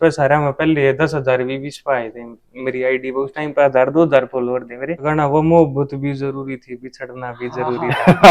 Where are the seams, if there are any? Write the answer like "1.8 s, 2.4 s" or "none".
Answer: 5.1 s

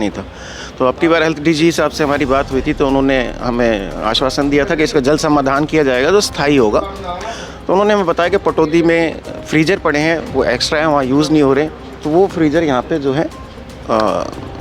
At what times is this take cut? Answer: none

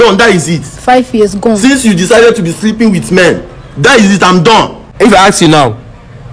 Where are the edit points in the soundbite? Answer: 4.8 s

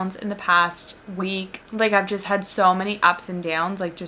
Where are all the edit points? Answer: none

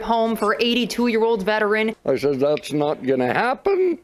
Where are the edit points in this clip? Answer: 2.0 s

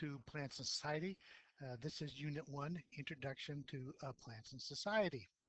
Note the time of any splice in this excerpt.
none

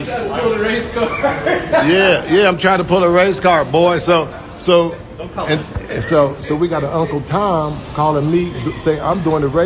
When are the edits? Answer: 2.4 s

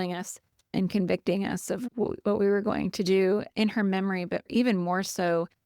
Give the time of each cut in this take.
4.5 s

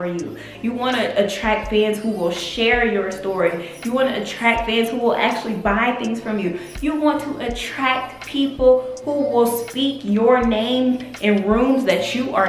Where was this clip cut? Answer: none

